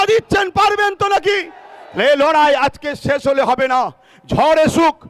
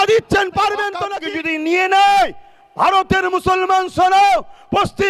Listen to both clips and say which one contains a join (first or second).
second